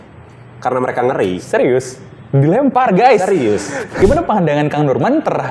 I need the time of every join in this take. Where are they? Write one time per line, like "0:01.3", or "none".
0:04.0